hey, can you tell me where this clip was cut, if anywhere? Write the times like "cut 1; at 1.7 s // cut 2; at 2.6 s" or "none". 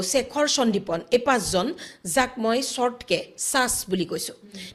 none